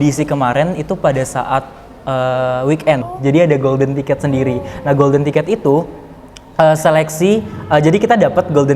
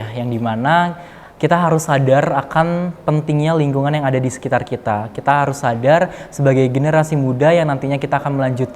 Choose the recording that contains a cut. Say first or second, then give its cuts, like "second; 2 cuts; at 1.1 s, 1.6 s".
first; 1 cut; at 3.1 s